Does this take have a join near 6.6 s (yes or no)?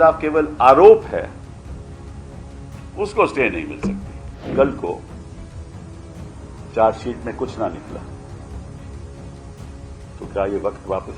yes